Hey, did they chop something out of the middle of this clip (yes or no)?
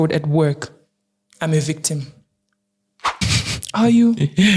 yes